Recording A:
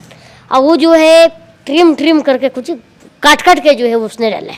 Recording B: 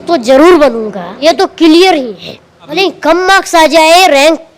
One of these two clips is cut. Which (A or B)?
B